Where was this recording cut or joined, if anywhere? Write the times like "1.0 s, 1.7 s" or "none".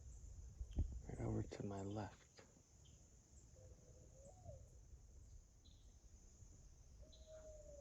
5.3 s